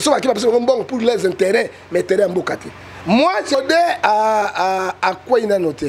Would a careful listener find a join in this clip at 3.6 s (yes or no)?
yes